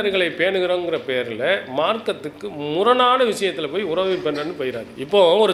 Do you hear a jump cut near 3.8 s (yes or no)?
no